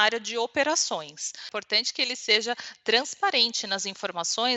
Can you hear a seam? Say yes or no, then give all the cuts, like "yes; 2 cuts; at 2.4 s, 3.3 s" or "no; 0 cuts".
yes; 1 cut; at 1.4 s